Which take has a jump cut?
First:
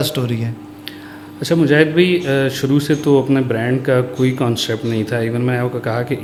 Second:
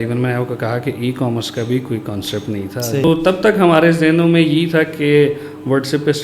second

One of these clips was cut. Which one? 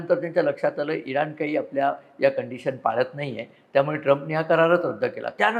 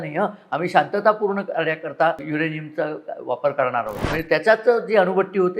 second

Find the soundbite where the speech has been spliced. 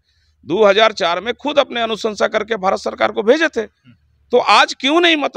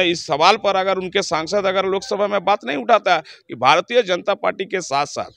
second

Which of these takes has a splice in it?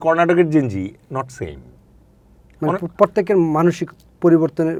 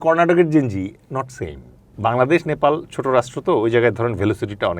second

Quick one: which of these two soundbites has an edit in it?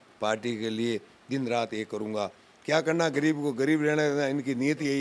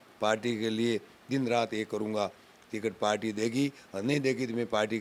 first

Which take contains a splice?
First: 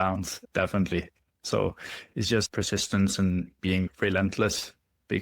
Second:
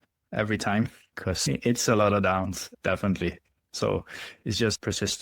first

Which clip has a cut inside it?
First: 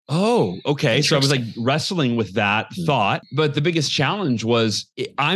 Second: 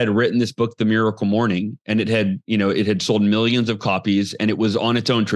first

